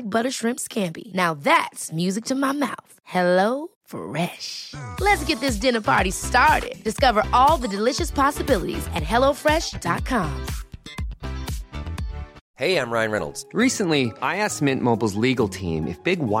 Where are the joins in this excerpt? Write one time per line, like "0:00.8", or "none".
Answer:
0:12.4